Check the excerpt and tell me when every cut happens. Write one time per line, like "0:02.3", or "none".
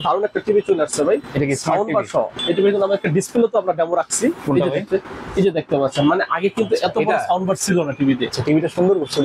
0:02.3